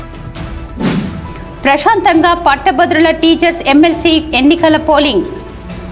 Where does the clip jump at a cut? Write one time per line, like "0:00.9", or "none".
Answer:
0:01.0

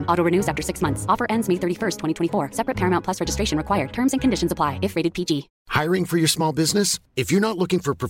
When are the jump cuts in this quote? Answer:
0:05.6

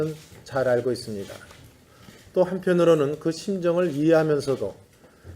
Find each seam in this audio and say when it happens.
0:02.4

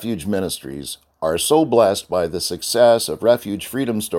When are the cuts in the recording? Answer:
none

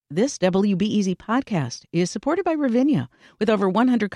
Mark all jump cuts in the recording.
none

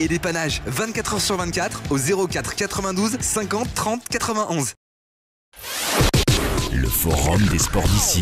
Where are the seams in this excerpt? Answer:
0:05.5

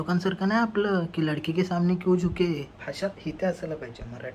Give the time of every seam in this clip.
0:02.8

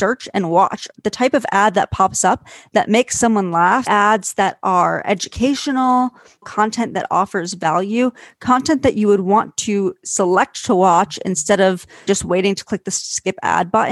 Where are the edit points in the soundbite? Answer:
0:00.9
0:03.9
0:06.5
0:12.0

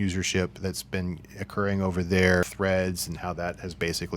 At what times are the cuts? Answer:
0:02.4

